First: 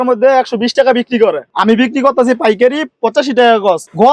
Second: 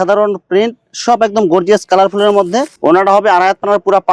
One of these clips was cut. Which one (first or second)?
second